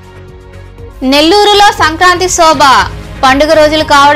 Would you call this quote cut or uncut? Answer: uncut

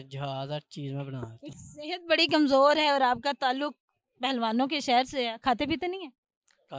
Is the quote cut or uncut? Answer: cut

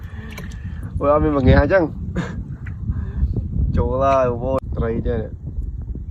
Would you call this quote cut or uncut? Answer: cut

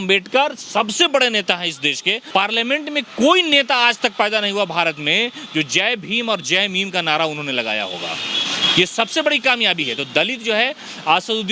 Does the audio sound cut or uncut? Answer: cut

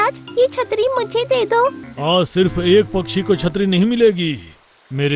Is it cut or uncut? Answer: cut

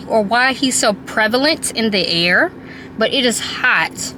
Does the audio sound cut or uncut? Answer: uncut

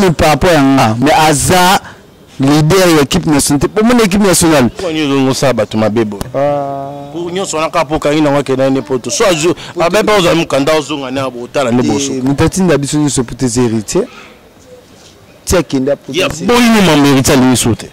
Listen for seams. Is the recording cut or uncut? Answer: cut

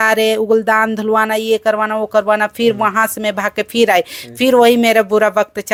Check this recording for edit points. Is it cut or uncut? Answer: uncut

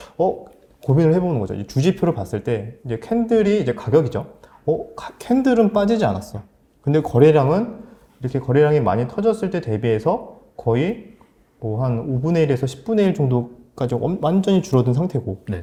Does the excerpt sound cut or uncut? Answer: uncut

